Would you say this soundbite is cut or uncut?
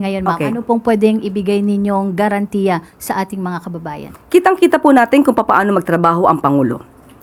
uncut